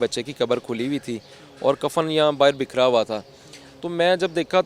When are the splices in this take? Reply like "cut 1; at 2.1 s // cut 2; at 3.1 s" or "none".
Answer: none